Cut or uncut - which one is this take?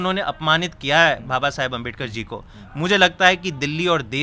uncut